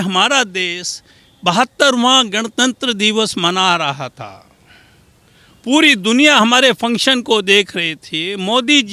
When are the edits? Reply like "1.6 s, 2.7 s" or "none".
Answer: none